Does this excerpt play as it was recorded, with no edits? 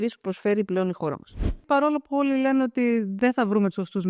no; 1 cut; at 1.6 s

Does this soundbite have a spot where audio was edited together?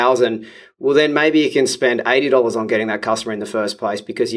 no; 0 cuts

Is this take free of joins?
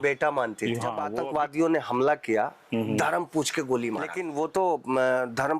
no; 2 cuts; at 1.1 s, 4.2 s

